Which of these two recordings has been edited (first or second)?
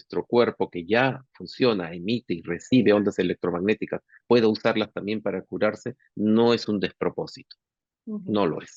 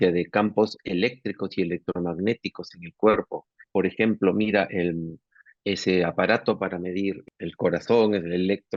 second